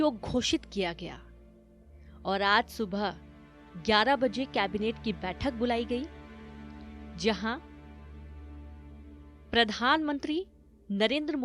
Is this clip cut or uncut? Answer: cut